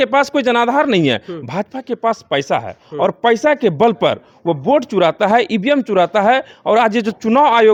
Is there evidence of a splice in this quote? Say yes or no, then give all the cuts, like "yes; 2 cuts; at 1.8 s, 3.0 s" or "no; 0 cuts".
no; 0 cuts